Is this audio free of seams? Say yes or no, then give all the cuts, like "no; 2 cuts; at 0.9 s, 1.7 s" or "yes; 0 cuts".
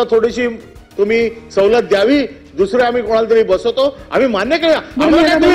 yes; 0 cuts